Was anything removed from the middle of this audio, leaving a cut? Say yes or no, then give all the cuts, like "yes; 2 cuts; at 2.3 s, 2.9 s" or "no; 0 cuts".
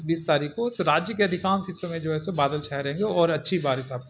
no; 0 cuts